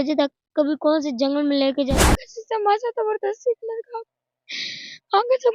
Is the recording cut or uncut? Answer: cut